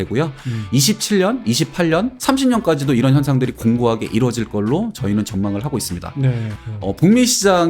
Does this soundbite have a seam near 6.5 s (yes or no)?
yes